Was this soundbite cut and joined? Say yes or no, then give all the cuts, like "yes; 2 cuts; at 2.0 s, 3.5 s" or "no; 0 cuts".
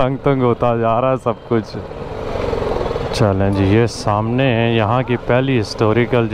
yes; 1 cut; at 2.2 s